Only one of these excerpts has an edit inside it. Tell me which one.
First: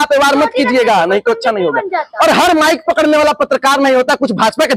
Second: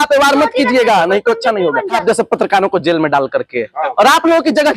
second; 1 cut; at 2.0 s

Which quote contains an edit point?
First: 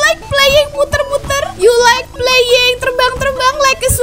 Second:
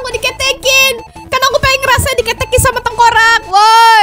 first; 1 cut; at 1.5 s

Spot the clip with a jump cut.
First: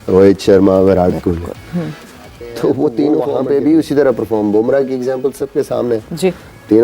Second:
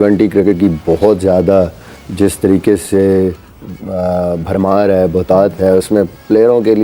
first; 1 cut; at 3.3 s

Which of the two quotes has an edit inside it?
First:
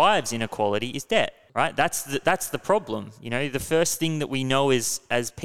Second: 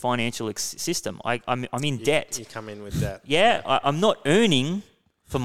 first; 1 cut; at 1.4 s

